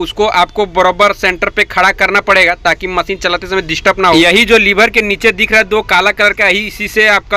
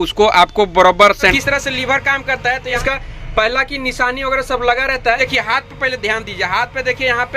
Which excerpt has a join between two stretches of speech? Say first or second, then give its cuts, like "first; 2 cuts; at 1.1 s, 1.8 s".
second; 3 cuts; at 1.3 s, 2.7 s, 5.2 s